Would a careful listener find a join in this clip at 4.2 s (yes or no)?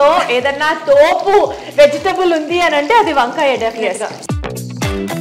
yes